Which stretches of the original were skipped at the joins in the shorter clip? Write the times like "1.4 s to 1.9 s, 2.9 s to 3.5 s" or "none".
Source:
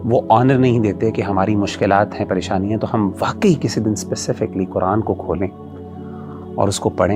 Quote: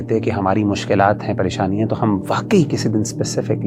none